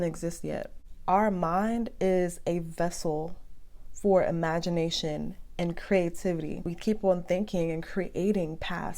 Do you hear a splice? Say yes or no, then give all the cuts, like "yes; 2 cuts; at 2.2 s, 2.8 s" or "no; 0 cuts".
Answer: yes; 1 cut; at 6.6 s